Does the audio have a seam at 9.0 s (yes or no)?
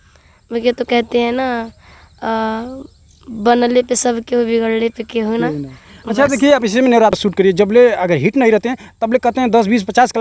no